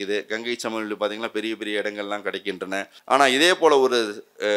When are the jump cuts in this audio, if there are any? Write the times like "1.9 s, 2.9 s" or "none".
2.9 s